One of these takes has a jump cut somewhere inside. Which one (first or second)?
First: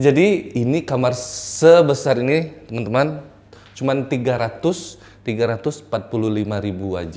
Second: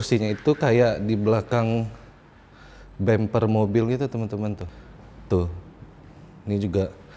second